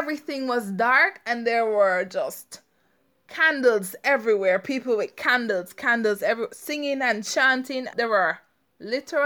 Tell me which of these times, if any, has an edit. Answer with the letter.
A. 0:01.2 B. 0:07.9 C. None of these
B